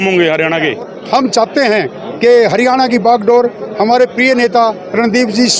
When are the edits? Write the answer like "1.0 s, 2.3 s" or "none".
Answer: 1.0 s